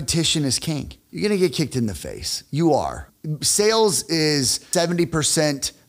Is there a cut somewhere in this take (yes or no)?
yes